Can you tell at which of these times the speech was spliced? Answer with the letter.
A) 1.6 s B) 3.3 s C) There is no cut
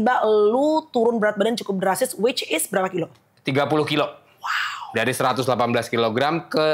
C